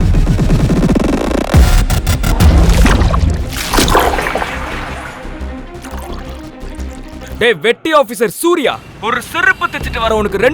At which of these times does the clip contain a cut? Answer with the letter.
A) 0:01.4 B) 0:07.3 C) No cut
B